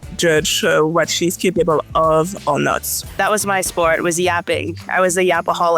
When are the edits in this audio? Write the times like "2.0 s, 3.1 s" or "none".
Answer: 3.2 s